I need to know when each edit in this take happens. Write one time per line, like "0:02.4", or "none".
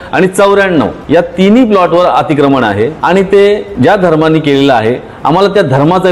0:01.0
0:03.0
0:03.7